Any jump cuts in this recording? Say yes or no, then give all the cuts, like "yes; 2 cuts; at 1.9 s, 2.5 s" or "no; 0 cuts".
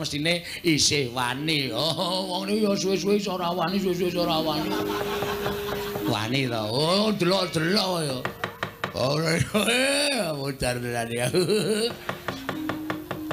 no; 0 cuts